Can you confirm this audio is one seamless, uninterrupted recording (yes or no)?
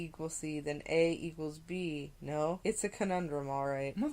no